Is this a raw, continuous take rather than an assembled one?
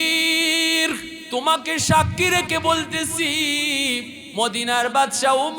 no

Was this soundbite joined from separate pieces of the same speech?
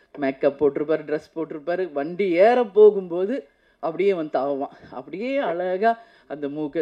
no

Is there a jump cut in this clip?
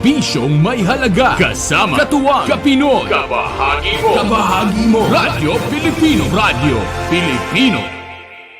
yes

